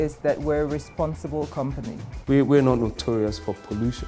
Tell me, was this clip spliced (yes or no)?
yes